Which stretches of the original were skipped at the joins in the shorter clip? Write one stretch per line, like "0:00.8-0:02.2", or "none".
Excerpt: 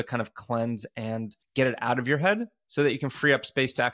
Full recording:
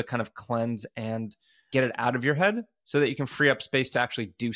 0:01.4-0:01.5